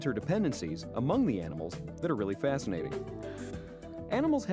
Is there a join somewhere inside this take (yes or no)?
yes